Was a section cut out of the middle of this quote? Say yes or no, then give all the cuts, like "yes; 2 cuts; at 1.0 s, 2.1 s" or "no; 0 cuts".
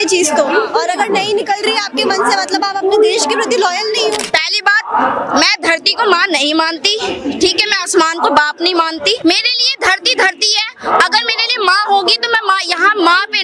yes; 2 cuts; at 4.2 s, 9.2 s